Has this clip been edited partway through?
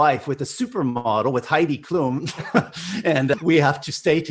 no; 0 cuts

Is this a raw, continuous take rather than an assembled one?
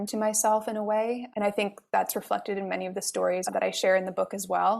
no; 1 cut; at 3.5 s

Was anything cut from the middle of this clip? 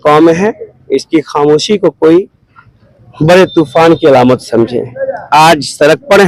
no; 0 cuts

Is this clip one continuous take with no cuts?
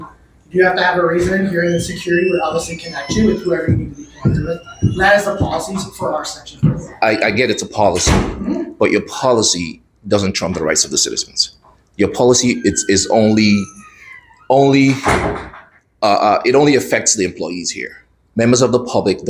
yes; 0 cuts

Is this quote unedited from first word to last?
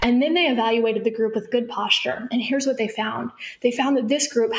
yes; 0 cuts

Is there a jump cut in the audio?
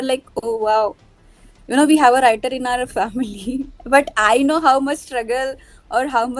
no; 0 cuts

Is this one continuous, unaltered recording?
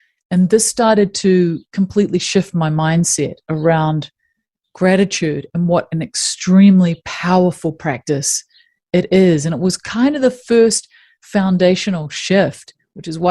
yes; 0 cuts

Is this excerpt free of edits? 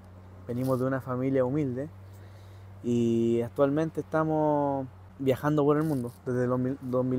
yes; 0 cuts

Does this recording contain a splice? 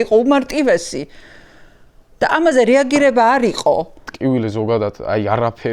yes; 1 cut; at 4.1 s

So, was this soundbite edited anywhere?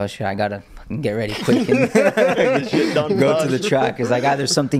no; 0 cuts

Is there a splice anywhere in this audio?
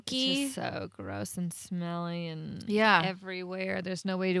no; 0 cuts

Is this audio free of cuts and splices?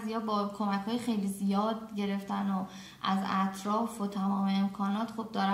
yes; 0 cuts

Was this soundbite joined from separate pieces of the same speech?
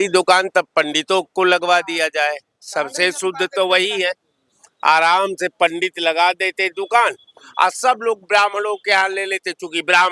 no; 0 cuts

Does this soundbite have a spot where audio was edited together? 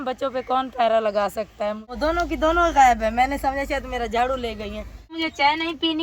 yes; 2 cuts; at 1.9 s, 5.1 s

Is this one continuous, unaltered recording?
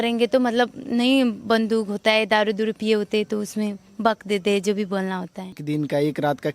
no; 1 cut; at 5.6 s

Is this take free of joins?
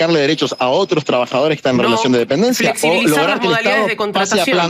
yes; 0 cuts

